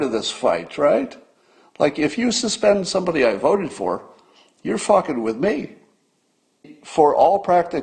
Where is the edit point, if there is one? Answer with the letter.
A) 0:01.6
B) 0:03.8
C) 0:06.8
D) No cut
C